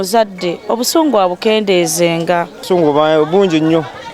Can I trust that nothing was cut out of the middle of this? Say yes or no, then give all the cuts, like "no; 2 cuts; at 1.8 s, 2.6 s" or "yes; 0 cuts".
no; 1 cut; at 2.6 s